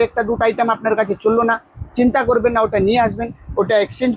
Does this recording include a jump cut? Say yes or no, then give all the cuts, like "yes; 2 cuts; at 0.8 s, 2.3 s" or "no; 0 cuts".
no; 0 cuts